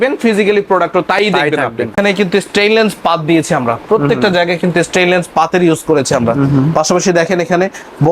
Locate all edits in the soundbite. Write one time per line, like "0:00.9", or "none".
0:01.9